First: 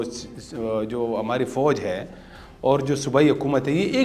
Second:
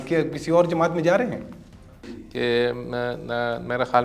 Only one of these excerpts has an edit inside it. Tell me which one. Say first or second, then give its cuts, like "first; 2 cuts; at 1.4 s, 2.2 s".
second; 1 cut; at 2.2 s